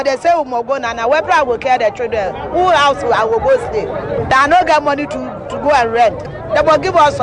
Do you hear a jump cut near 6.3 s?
yes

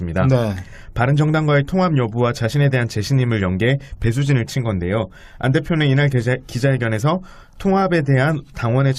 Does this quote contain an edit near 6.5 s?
no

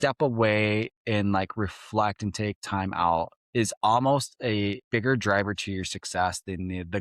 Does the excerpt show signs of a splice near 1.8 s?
no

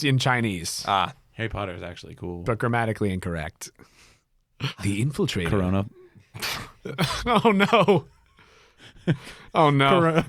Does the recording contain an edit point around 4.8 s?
yes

